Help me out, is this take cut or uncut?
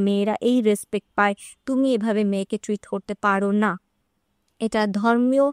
uncut